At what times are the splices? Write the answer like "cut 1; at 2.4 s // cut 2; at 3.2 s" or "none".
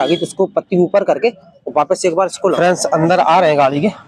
cut 1; at 2.6 s